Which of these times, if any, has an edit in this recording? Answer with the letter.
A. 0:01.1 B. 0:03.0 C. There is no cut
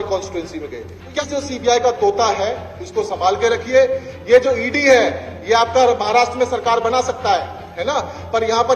A